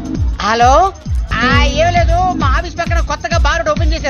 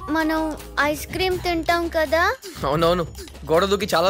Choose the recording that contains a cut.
first; 1 cut; at 1.3 s

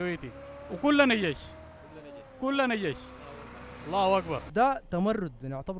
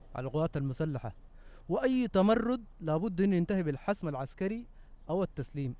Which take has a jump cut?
first; 1 cut; at 4.5 s

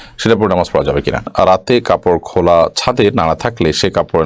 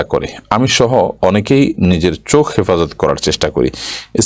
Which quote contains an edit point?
first; 1 cut; at 1.3 s

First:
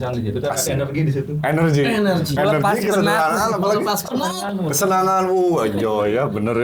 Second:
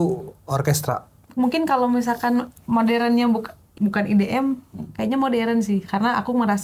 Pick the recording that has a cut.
second; 2 cuts; at 1.1 s, 3.7 s

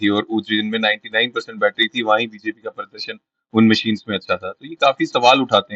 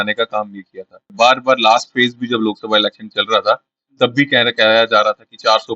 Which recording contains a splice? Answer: second; 1 cut; at 1.1 s

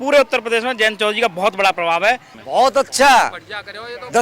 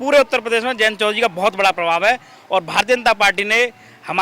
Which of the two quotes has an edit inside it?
first; 1 cut; at 2.4 s

